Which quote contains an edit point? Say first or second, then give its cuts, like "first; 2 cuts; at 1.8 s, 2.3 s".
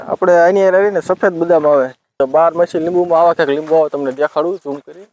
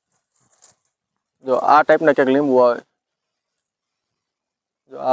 first; 1 cut; at 2.2 s